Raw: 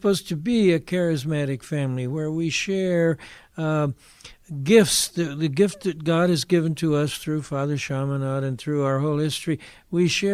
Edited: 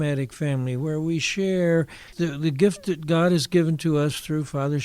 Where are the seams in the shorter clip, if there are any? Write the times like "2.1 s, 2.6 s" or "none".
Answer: 2.0 s